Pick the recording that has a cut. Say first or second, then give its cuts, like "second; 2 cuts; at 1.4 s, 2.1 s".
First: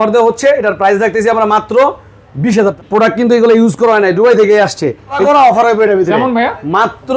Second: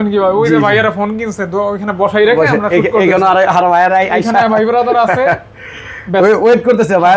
first; 2 cuts; at 2.5 s, 5.2 s